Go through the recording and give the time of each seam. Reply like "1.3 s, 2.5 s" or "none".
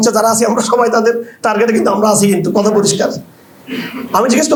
none